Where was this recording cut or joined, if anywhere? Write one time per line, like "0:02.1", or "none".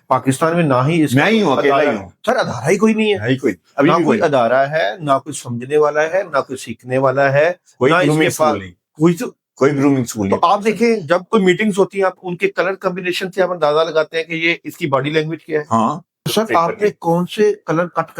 0:16.2